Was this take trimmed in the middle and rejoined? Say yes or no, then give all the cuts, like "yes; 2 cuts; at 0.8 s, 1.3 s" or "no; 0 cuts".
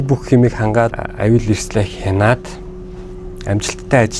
yes; 1 cut; at 1.0 s